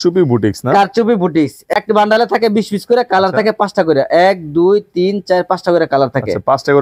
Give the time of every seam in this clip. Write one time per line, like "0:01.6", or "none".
0:01.7